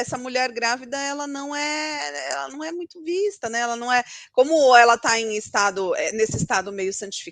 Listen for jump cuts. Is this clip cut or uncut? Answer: uncut